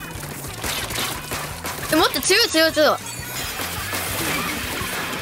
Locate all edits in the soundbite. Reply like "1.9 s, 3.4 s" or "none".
3.4 s